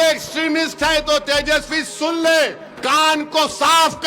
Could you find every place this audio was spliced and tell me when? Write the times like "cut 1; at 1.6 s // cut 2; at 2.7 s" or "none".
cut 1; at 2.7 s